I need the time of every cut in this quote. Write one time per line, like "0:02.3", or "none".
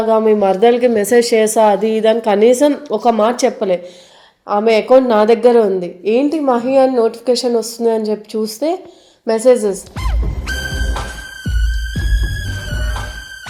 none